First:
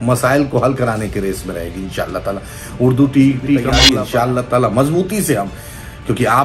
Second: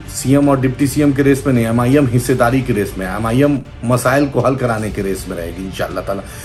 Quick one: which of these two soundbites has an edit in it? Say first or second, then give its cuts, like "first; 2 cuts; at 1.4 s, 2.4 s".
first; 1 cut; at 3.8 s